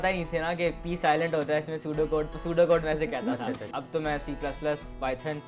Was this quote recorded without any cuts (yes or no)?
no